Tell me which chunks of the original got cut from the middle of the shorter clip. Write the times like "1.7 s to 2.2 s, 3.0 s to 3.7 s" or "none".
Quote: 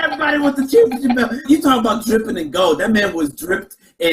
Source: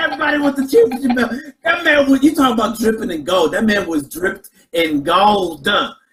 1.5 s to 2.2 s